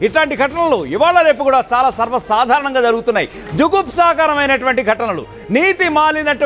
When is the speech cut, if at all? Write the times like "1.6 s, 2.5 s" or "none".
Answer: none